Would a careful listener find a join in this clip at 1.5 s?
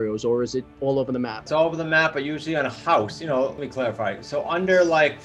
yes; 2 cuts; at 1.5 s, 3.6 s

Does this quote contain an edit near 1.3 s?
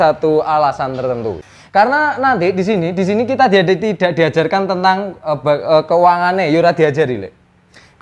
yes; 1 cut; at 1.3 s

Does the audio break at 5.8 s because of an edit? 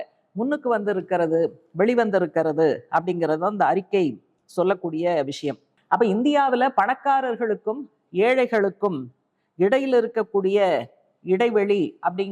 no; 0 cuts

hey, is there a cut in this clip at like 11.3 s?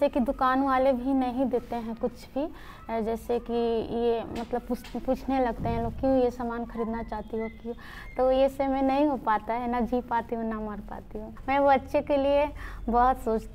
yes; 1 cut; at 11.3 s

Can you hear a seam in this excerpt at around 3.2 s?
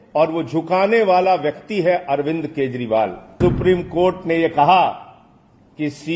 yes; 1 cut; at 3.2 s

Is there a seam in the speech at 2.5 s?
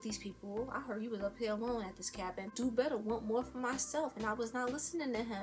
yes; 1 cut; at 2.5 s

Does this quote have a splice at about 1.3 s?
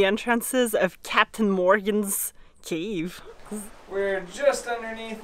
no; 1 cut; at 3.5 s

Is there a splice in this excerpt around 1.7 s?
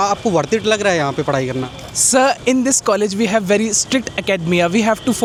no; 0 cuts

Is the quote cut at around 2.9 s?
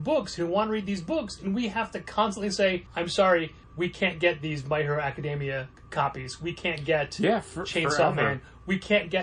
yes; 3 cuts; at 2.9 s, 3.6 s, 5.8 s

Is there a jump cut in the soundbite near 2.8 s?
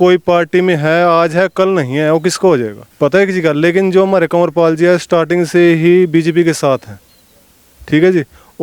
yes; 1 cut; at 2.8 s

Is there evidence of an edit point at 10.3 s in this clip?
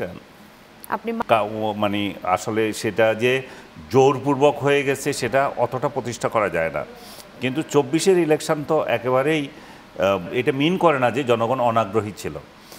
yes; 2 cuts; at 1.2 s, 10.3 s

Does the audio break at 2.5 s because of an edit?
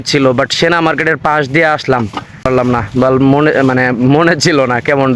yes; 1 cut; at 2.5 s

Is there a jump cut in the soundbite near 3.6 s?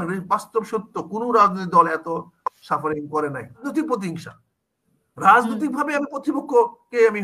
yes; 1 cut; at 3.6 s

